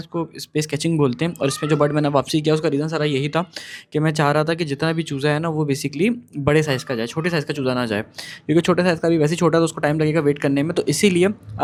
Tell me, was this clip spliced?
no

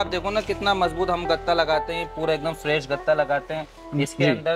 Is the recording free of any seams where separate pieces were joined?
yes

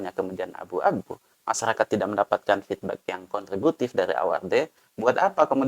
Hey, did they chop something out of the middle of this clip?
no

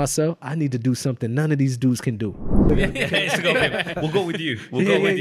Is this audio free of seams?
no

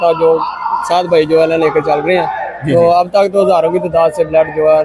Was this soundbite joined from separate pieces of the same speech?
no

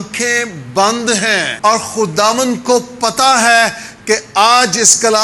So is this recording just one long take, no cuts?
no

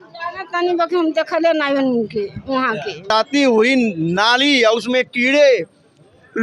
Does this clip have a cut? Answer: yes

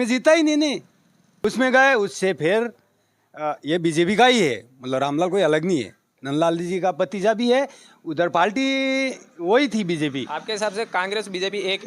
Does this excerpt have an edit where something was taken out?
yes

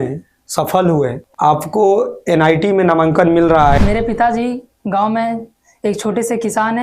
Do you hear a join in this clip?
yes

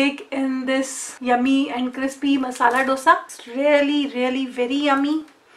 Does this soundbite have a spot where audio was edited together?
yes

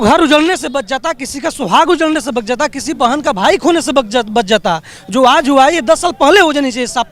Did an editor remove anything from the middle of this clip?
no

